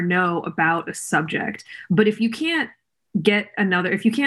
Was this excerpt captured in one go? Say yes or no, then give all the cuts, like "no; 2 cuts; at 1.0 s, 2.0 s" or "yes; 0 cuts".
yes; 0 cuts